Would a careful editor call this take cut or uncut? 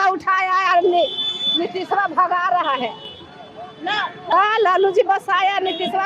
cut